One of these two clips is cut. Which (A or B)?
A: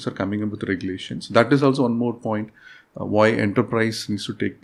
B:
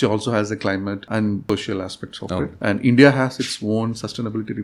B